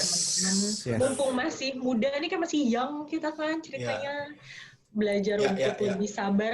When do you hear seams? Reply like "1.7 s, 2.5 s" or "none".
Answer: none